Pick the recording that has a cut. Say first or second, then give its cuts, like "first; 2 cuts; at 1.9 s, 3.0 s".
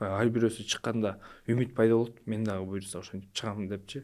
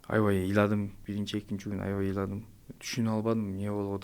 second; 1 cut; at 1.0 s